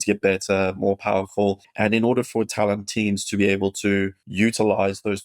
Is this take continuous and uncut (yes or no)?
no